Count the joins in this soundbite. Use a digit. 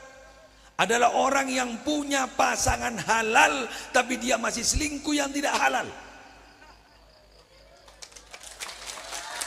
0